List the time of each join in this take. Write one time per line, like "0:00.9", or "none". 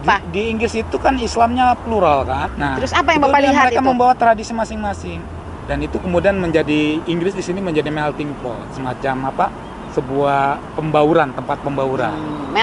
0:02.5